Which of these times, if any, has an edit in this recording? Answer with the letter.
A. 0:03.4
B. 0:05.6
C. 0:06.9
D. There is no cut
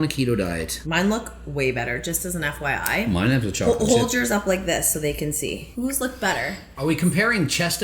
B